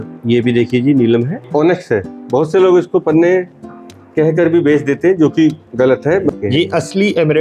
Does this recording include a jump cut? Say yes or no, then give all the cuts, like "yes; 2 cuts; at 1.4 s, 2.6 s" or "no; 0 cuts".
yes; 2 cuts; at 1.4 s, 6.3 s